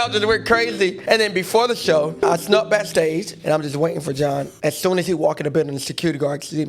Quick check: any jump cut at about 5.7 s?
no; 4 cuts; at 1.0 s, 2.2 s, 3.3 s, 4.5 s

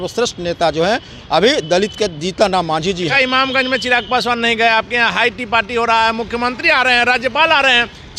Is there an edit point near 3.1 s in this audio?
yes; 1 cut; at 3.1 s

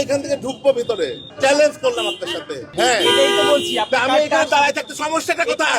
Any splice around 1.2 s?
yes; 2 cuts; at 1.2 s, 2.7 s

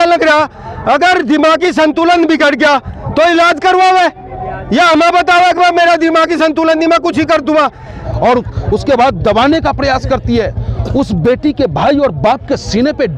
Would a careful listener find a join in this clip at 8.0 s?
yes; 1 cut; at 8.0 s

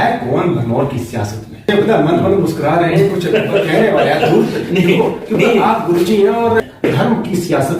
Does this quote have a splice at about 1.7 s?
yes; 2 cuts; at 1.7 s, 6.7 s

